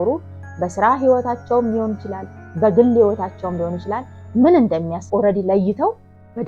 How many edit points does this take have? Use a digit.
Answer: 1